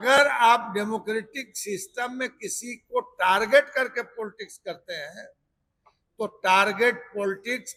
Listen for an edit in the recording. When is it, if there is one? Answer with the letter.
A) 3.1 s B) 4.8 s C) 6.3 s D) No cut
D